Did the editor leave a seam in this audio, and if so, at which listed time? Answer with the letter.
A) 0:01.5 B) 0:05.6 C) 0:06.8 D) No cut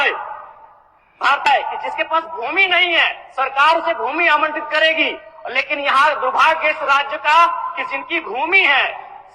A